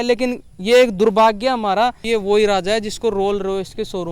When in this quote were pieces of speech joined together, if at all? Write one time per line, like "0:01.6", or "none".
0:02.0